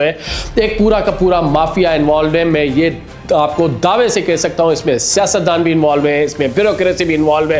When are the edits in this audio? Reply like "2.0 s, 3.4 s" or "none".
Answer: none